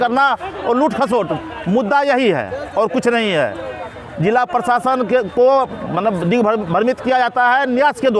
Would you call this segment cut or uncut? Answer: uncut